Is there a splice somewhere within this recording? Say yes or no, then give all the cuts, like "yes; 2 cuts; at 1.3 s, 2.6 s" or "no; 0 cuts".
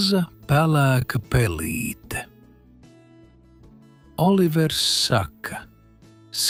no; 0 cuts